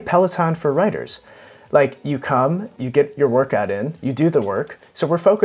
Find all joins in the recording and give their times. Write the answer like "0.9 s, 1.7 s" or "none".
2.8 s